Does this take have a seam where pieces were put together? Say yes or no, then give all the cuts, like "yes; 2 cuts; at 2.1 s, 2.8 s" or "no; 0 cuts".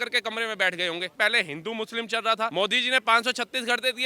yes; 2 cuts; at 1.1 s, 2.5 s